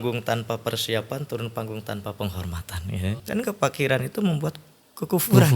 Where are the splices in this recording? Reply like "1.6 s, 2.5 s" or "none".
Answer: 3.4 s